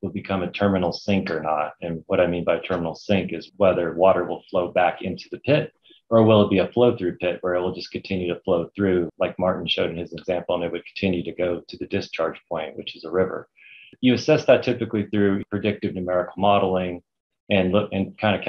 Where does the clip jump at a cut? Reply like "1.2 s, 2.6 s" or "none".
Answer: none